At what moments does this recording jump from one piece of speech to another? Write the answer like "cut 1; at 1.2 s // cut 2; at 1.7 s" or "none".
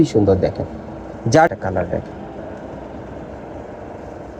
cut 1; at 1.5 s